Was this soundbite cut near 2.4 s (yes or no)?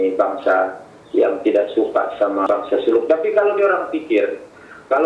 yes